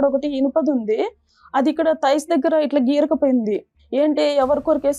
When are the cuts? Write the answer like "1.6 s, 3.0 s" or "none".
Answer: 3.8 s